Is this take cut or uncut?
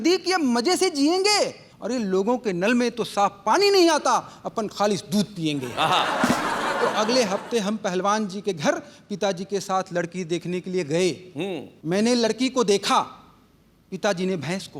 uncut